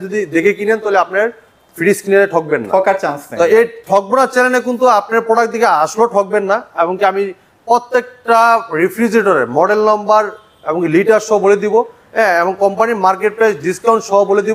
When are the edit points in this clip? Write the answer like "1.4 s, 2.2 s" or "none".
none